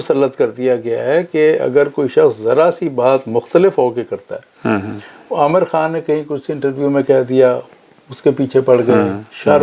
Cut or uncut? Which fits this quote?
uncut